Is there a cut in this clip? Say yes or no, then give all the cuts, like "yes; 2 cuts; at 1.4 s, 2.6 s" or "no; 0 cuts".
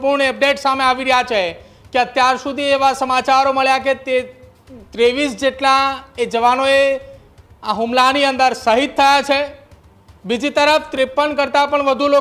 no; 0 cuts